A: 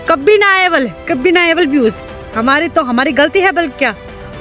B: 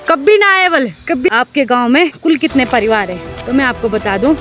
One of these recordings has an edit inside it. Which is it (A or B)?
B